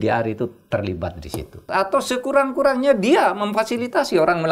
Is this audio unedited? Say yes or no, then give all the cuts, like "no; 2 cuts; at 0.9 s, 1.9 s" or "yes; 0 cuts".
no; 1 cut; at 1.6 s